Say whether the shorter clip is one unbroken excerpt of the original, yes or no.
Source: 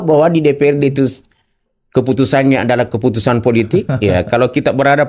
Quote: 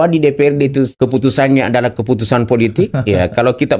no